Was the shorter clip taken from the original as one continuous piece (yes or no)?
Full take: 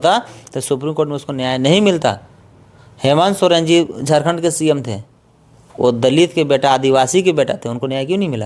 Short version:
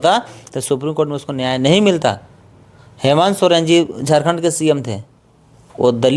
yes